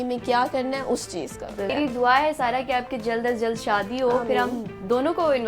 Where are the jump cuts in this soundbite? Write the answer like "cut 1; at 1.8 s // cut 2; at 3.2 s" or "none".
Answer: cut 1; at 1.7 s

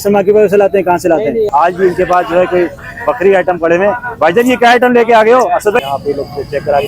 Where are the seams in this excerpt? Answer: cut 1; at 1.5 s // cut 2; at 5.8 s

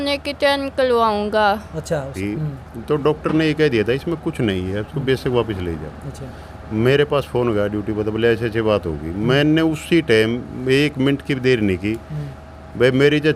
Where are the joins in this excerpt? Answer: cut 1; at 2.1 s

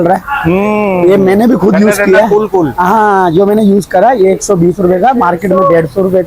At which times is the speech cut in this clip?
none

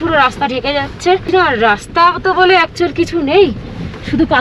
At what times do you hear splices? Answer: cut 1; at 1.2 s

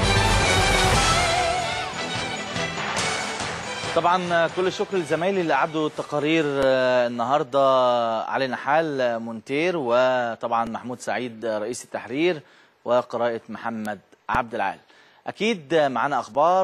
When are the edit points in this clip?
cut 1; at 15.2 s

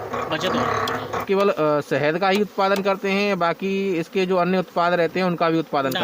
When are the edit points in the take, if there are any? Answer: cut 1; at 1.2 s

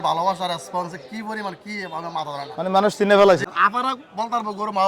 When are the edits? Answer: cut 1; at 3.4 s

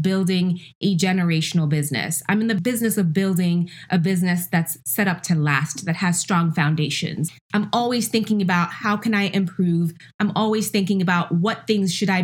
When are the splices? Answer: cut 1; at 4.8 s // cut 2; at 7.2 s

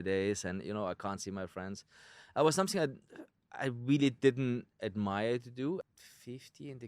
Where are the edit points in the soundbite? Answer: cut 1; at 5.8 s

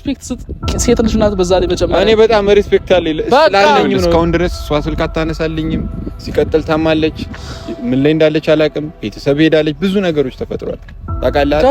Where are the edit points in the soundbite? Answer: cut 1; at 4.1 s

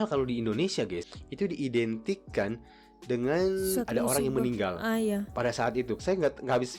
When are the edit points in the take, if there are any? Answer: cut 1; at 1.1 s // cut 2; at 6.0 s

